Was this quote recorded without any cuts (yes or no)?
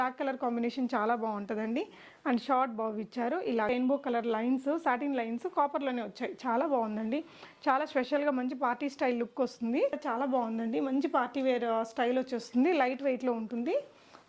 no